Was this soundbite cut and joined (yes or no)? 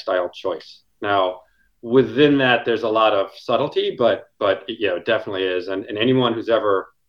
no